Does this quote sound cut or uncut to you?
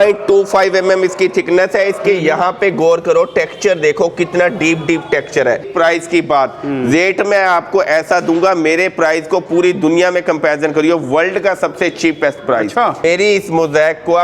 cut